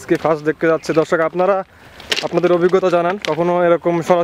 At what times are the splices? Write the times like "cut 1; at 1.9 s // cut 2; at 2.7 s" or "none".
none